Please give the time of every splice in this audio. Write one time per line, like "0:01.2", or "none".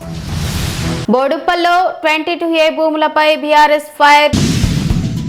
none